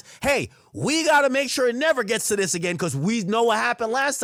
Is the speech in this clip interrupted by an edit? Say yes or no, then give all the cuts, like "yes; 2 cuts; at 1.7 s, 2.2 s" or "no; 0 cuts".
no; 0 cuts